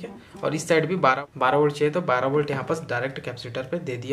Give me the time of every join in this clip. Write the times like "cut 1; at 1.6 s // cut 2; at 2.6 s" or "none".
cut 1; at 1.2 s